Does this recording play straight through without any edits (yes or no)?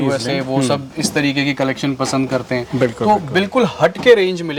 yes